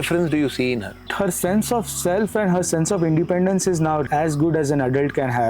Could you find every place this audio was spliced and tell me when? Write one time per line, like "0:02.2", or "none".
0:01.1
0:04.0